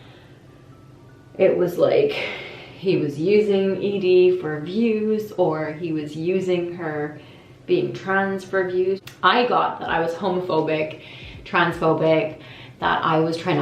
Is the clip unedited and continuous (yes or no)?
no